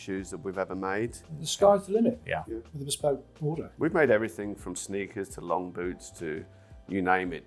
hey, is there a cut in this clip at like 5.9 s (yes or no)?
no